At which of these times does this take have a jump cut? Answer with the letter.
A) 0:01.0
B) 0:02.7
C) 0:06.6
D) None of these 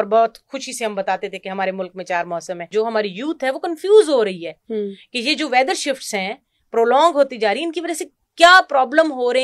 B